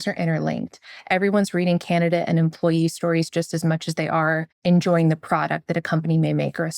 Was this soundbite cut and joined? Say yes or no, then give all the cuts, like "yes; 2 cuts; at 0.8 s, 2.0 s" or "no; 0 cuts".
yes; 1 cut; at 4.5 s